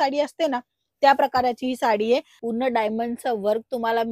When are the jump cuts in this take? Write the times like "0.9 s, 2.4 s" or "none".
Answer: 2.3 s

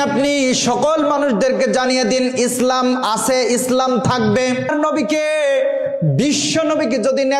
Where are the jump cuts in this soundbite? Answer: 4.7 s

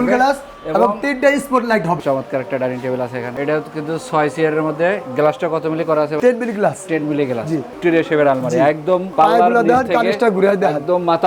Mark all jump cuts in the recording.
2.0 s, 7.7 s, 9.1 s

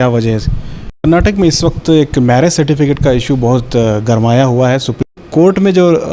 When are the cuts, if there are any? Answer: 1.0 s, 5.1 s

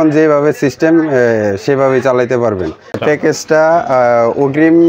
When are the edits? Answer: 3.0 s

